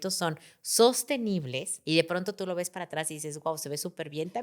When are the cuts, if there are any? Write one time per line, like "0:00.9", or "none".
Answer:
0:01.7